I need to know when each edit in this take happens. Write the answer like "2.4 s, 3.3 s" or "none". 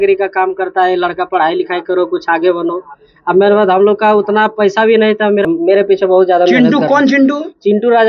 5.5 s